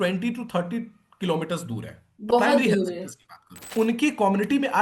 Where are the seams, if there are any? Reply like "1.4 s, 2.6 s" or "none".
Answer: 3.6 s